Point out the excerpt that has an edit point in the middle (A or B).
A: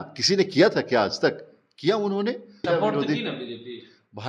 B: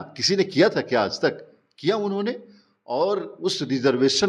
A